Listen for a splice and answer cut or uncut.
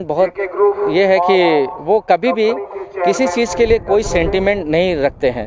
uncut